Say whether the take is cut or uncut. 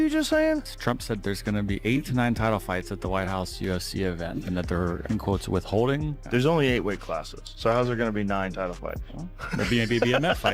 uncut